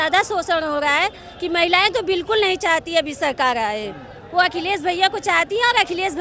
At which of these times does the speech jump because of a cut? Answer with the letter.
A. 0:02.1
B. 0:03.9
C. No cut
C